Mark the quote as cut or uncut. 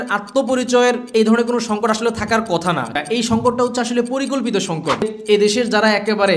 cut